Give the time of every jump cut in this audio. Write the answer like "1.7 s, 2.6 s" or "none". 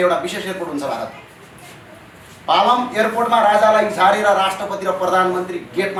none